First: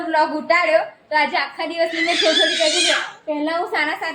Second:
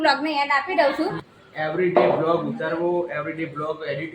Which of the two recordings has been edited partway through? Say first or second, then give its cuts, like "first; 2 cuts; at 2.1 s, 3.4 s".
second; 1 cut; at 1.3 s